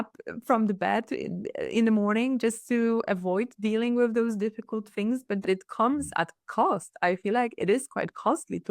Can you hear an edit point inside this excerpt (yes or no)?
yes